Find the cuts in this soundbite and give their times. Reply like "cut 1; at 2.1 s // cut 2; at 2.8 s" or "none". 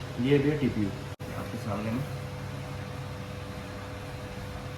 cut 1; at 1.2 s